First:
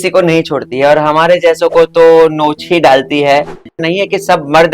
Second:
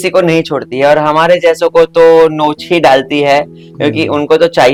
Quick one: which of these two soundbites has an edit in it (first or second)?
first